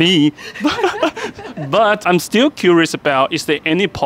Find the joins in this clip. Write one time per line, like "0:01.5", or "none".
0:02.0